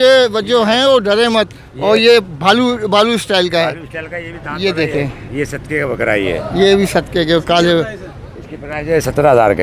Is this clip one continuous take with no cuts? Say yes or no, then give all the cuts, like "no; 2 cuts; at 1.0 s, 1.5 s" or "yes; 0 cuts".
yes; 0 cuts